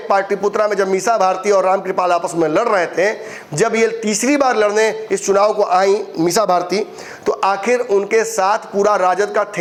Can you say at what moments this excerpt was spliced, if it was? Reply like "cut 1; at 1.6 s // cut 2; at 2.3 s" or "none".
none